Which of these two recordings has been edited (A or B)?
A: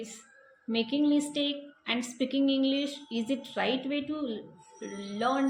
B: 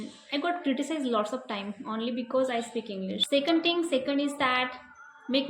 B